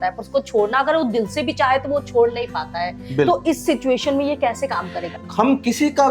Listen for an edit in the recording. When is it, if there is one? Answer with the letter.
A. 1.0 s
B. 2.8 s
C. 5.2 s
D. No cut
C